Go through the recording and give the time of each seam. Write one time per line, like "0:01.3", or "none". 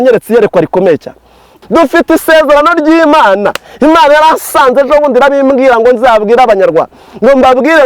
0:01.5